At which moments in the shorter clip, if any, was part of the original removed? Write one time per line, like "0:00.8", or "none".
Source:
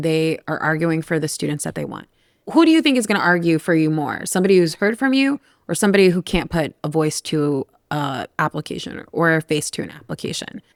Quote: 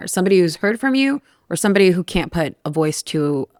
none